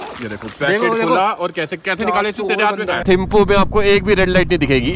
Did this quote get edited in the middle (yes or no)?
yes